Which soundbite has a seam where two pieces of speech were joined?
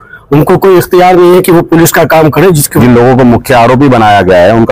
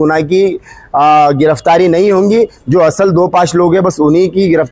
first; 1 cut; at 2.7 s

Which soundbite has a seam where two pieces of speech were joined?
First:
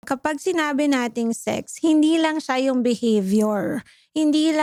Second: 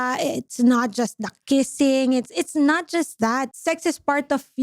second; 1 cut; at 3.5 s

